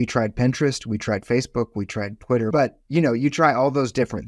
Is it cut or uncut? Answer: cut